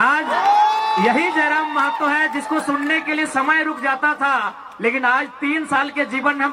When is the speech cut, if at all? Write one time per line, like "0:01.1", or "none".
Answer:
none